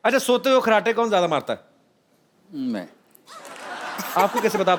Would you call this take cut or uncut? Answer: uncut